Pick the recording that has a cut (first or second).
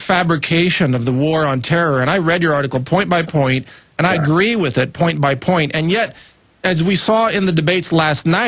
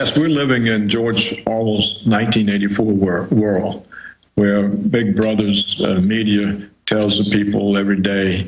second